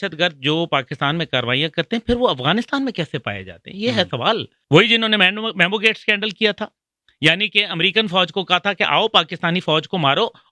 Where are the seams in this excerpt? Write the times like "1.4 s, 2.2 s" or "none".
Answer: 4.5 s